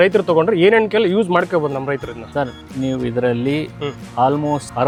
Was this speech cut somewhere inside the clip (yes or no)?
no